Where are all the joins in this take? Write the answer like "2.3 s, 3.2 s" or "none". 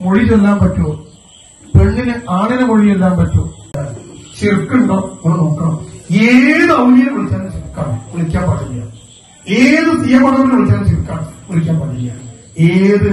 3.6 s